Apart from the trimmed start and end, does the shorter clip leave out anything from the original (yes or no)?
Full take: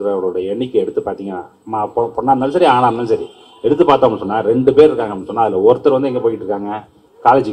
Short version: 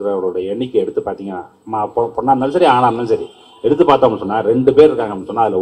no